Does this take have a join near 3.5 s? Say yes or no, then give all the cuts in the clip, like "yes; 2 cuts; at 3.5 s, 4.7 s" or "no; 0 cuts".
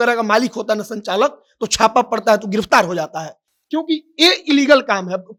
no; 0 cuts